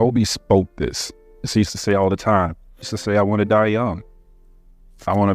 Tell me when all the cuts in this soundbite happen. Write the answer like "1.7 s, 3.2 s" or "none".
1.4 s, 2.9 s